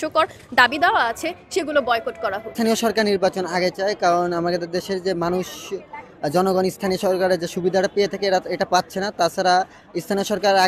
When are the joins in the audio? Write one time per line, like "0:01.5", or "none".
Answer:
0:02.5